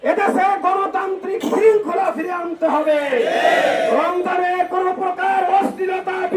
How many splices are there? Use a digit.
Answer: 0